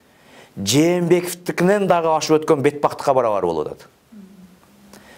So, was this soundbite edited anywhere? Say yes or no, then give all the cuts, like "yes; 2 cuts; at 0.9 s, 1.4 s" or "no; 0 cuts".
no; 0 cuts